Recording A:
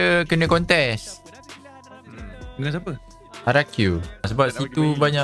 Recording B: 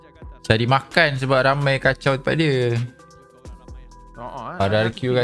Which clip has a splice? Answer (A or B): A